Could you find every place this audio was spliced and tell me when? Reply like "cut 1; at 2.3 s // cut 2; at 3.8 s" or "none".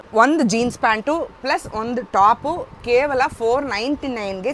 none